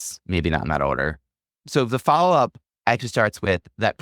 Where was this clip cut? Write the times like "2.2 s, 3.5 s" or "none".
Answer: 1.5 s